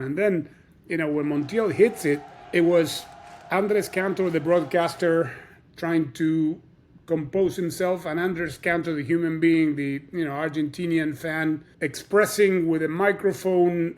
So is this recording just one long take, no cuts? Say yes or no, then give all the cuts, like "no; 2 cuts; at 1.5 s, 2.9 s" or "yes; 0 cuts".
no; 2 cuts; at 2.3 s, 11.7 s